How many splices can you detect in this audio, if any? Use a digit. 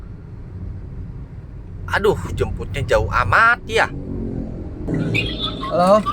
1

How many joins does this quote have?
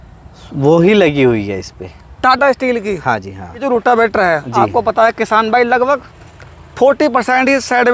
0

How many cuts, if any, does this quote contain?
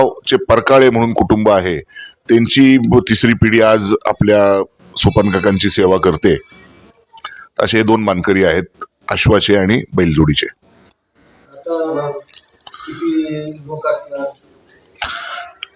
1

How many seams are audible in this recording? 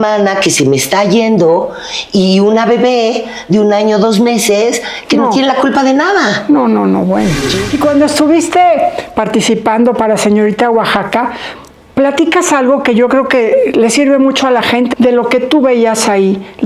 2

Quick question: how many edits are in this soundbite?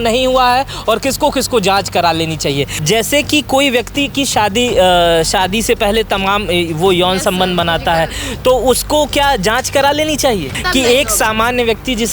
2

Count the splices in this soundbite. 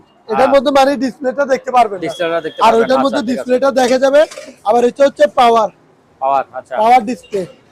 0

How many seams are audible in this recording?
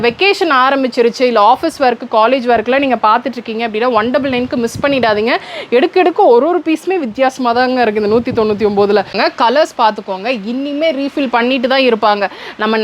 1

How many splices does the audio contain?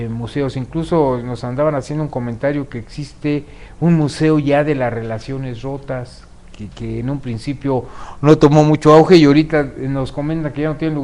0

